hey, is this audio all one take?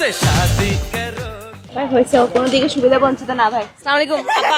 yes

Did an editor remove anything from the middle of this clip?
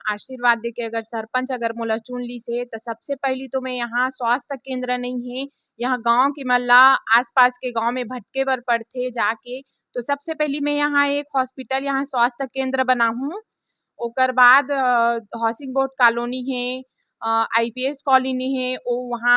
no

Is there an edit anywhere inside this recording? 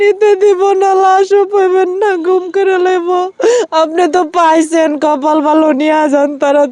no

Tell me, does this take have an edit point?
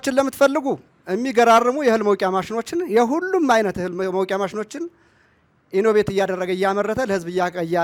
no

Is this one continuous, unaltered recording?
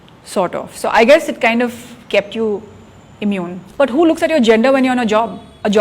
no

